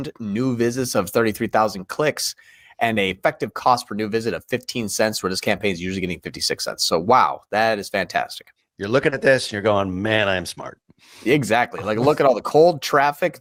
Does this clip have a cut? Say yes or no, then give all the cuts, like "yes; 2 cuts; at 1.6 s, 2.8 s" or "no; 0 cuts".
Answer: no; 0 cuts